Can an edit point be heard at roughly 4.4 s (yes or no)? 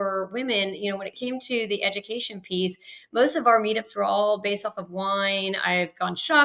no